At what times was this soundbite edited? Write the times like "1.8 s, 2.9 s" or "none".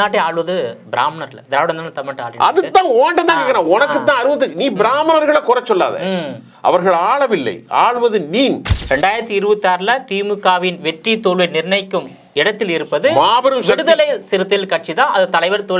8.7 s